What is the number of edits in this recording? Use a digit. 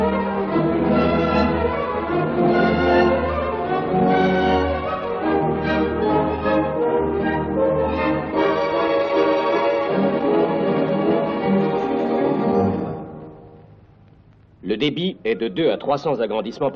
1